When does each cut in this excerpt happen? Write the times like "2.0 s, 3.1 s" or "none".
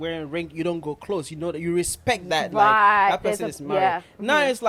none

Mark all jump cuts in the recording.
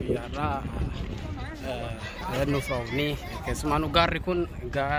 none

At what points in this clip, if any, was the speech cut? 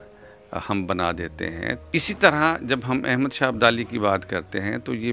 1.8 s

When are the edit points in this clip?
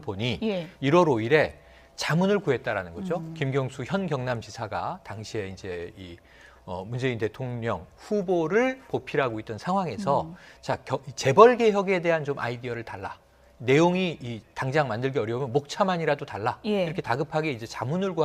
6.1 s

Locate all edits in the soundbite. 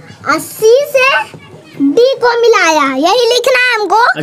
none

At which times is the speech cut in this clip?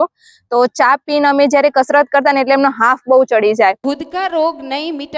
3.8 s

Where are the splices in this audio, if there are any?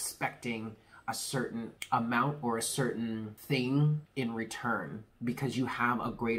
1.8 s, 3.3 s, 4.1 s, 5.0 s

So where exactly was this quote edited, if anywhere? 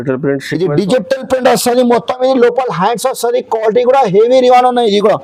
none

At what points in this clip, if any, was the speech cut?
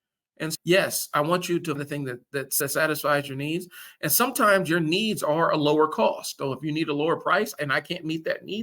1.8 s

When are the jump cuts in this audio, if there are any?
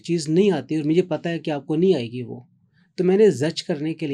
none

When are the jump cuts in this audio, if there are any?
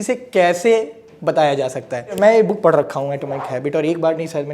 2.0 s

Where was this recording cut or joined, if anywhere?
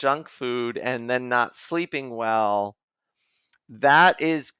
none

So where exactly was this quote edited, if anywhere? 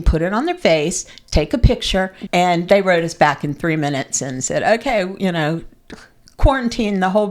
2.2 s

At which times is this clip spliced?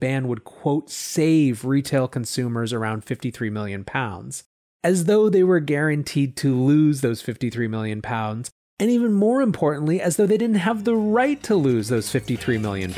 none

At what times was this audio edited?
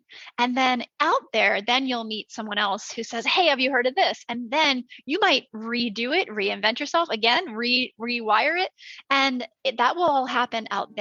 none

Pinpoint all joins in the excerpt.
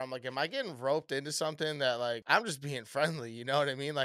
2.2 s

